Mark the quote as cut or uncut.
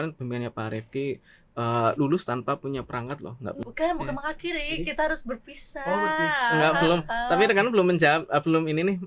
cut